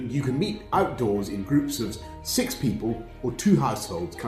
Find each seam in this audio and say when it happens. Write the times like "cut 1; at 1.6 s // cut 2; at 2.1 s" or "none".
none